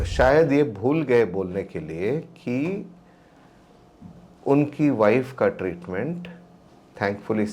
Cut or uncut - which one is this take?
uncut